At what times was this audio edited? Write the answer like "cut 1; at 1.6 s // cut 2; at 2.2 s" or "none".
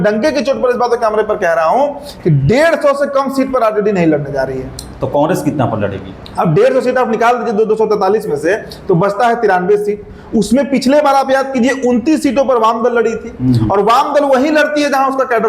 none